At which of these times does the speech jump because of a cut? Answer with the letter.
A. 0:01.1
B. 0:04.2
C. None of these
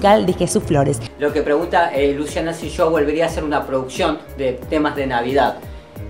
A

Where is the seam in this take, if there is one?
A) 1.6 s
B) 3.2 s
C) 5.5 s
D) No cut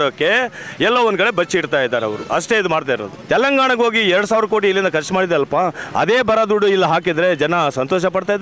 B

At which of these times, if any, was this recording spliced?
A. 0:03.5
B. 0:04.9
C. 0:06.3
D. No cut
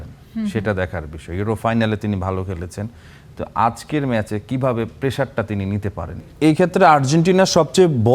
C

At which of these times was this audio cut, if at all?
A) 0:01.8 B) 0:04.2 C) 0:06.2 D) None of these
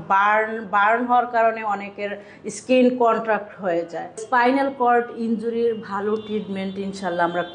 B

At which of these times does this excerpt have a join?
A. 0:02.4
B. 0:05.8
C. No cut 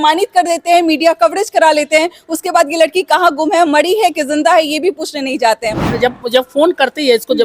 B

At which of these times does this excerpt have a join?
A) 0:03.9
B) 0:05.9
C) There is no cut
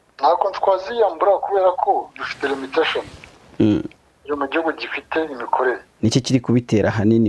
B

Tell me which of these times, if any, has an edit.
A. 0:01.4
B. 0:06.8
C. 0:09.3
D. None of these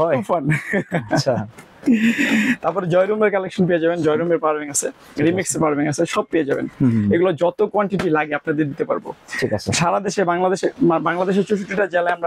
D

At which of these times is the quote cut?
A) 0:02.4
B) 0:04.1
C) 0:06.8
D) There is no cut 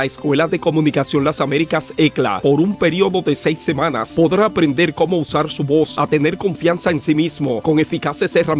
A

